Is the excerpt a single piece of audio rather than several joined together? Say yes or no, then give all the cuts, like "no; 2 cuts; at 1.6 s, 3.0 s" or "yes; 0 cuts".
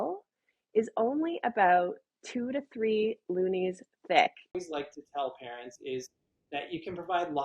no; 1 cut; at 4.5 s